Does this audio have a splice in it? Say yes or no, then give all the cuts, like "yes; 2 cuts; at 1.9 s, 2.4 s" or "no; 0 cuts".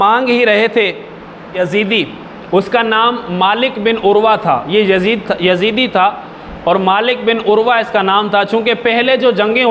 yes; 1 cut; at 1.6 s